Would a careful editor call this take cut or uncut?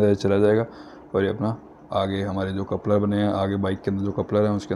uncut